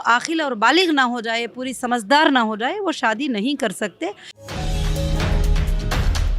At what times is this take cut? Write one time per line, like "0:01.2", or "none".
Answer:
0:04.3